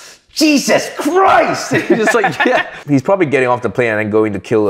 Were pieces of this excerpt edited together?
yes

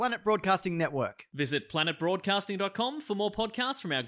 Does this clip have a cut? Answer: no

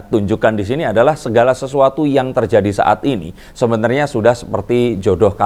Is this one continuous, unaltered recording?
yes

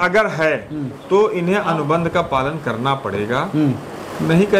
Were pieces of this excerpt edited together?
no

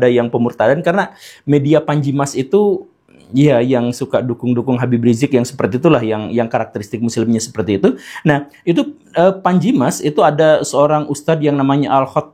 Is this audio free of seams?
yes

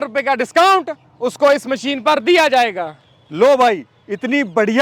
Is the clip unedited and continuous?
yes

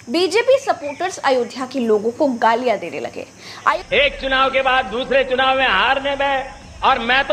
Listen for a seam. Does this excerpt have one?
yes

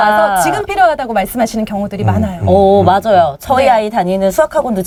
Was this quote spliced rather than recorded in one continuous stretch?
no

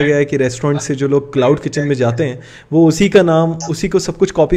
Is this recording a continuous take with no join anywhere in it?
yes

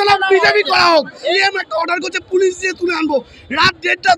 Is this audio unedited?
no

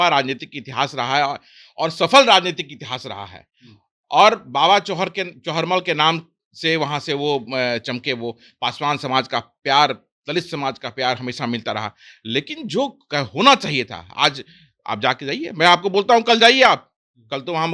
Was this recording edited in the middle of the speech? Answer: no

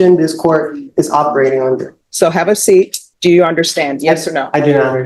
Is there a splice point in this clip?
yes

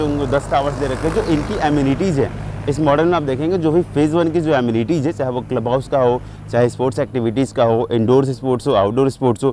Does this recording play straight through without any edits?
yes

